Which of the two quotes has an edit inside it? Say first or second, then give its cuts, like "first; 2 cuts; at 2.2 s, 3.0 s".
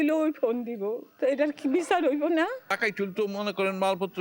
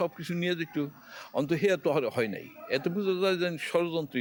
first; 2 cuts; at 1.1 s, 2.6 s